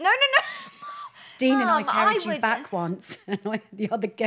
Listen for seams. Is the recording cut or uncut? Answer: uncut